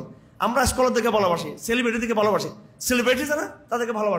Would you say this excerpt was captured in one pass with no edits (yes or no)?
yes